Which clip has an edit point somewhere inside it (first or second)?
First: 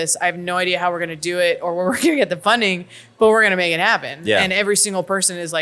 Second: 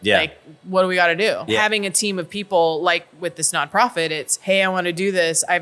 second